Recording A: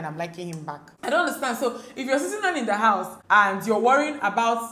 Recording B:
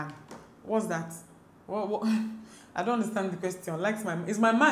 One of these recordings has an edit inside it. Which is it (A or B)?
A